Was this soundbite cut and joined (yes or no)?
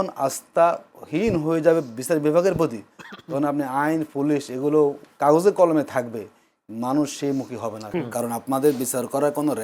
yes